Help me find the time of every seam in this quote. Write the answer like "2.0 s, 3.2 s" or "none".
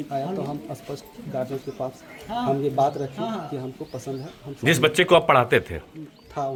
none